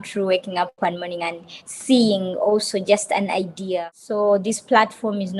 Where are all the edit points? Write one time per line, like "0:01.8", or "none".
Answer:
0:03.8